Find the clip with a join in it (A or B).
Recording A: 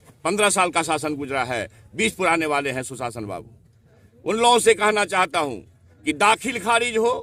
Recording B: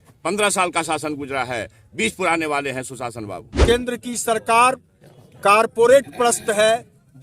B